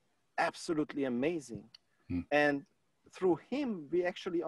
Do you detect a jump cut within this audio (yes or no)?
no